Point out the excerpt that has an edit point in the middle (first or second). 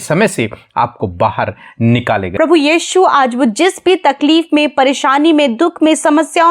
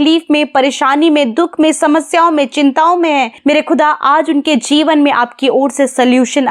first